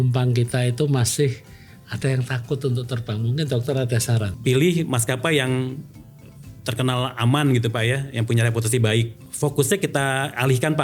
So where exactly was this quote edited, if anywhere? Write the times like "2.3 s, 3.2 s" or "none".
4.3 s, 9.2 s